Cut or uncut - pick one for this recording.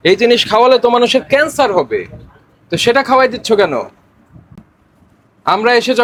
uncut